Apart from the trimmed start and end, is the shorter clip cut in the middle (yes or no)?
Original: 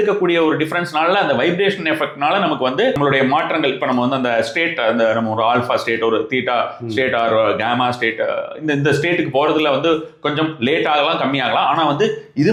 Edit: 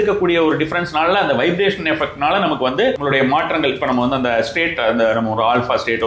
no